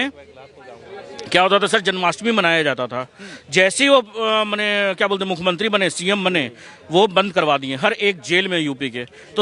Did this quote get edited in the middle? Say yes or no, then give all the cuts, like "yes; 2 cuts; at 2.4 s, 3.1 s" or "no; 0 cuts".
no; 0 cuts